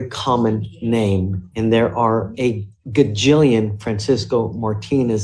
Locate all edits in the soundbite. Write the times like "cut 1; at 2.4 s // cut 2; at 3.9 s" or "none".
none